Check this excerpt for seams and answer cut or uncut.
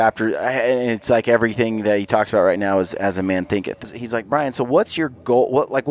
cut